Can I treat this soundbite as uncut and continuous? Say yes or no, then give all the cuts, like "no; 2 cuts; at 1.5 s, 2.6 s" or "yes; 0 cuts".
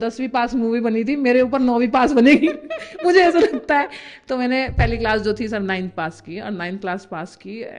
yes; 0 cuts